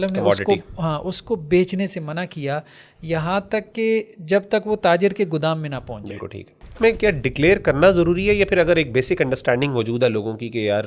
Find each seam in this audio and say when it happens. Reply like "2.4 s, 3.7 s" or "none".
6.7 s